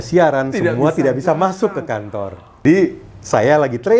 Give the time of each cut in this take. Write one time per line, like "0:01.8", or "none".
0:02.6